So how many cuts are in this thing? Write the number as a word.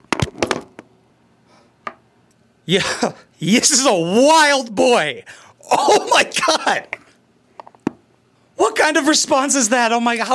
one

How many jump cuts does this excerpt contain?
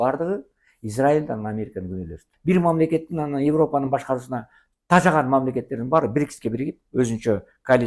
one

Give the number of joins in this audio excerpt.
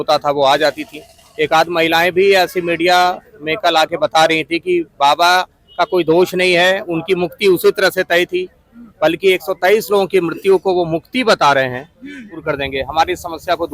one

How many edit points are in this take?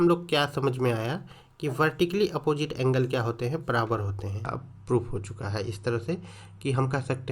one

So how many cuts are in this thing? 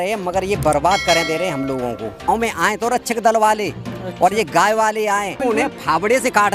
two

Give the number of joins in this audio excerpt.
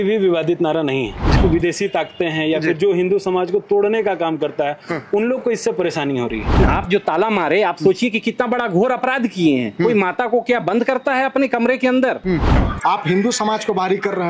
three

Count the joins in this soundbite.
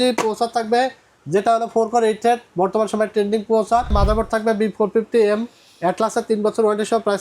one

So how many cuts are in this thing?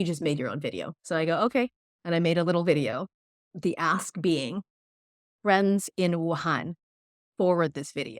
one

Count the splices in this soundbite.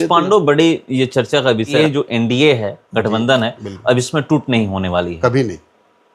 one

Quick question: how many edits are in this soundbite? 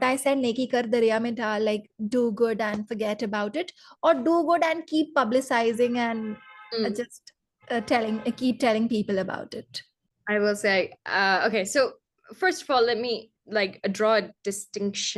zero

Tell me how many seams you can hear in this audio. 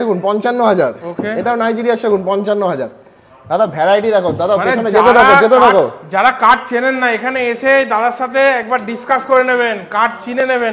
zero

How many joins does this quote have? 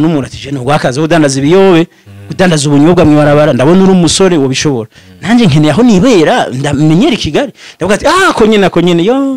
zero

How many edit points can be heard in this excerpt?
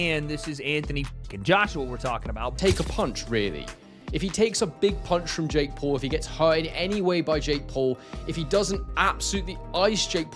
one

